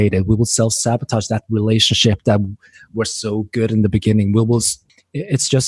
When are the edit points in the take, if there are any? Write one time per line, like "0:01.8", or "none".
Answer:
none